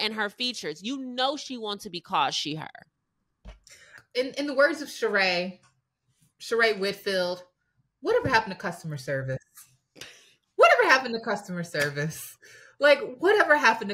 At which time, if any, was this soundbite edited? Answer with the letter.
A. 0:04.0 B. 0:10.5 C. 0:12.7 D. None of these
A